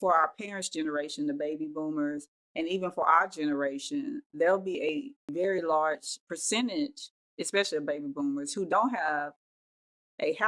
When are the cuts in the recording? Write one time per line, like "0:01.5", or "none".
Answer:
0:05.3
0:06.2